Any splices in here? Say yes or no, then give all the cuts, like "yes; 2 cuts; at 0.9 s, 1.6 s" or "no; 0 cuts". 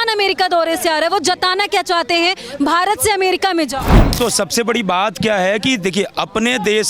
yes; 1 cut; at 4.1 s